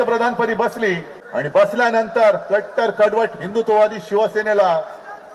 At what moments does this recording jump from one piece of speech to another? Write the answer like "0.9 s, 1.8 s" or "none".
1.1 s